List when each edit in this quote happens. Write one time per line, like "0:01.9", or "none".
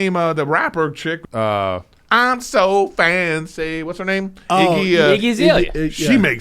0:01.2